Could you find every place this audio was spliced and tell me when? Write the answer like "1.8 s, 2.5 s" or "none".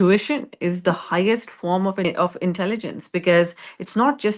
2.0 s